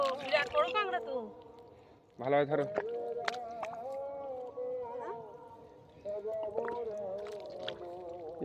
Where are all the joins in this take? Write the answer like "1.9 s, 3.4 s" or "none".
none